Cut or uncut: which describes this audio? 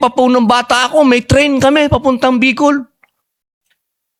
uncut